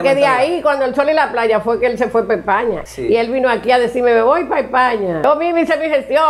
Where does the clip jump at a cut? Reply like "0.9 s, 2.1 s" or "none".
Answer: 2.8 s, 5.2 s